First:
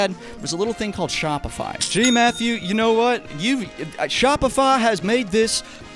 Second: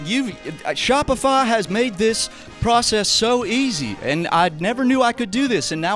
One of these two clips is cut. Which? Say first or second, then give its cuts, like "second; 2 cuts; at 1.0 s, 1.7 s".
first; 1 cut; at 1.8 s